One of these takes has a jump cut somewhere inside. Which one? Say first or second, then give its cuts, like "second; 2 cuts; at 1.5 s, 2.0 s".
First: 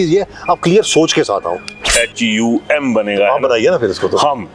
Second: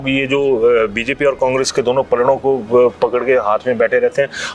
first; 1 cut; at 1.9 s